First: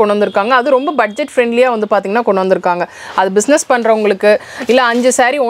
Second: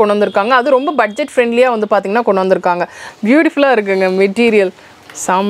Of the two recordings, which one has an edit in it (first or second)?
second